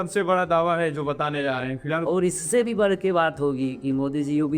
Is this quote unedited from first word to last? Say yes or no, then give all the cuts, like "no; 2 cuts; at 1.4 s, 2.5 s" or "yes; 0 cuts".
no; 1 cut; at 2.0 s